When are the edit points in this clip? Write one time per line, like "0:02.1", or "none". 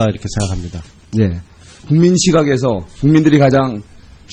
0:02.0